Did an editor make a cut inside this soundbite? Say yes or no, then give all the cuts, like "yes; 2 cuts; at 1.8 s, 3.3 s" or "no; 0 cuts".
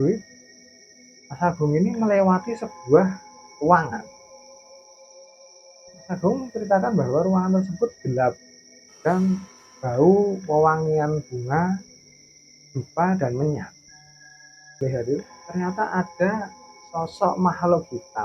yes; 1 cut; at 14.8 s